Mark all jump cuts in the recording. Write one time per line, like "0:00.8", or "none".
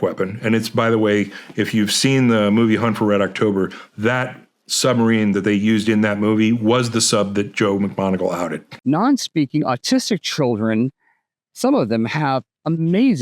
0:08.7

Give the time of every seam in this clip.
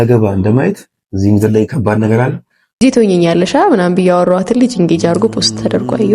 0:02.8

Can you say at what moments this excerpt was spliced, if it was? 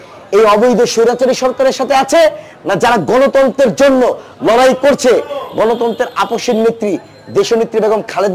none

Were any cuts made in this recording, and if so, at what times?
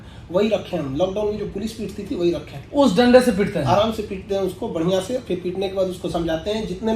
none

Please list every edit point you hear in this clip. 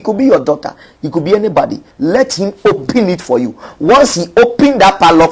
0:01.8

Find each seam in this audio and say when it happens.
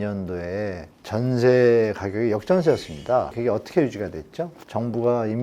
0:00.9
0:03.3

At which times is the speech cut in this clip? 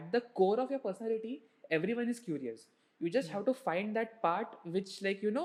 none

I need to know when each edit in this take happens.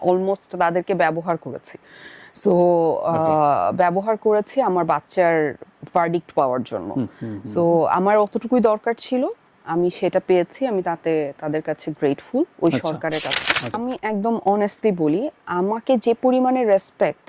0:13.8

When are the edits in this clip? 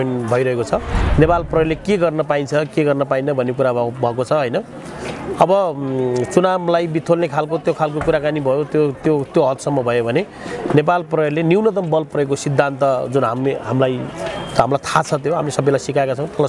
0:01.0

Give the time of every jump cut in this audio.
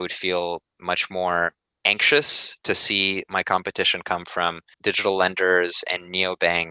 0:01.7
0:04.7

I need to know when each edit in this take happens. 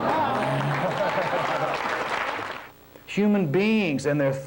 0:02.5

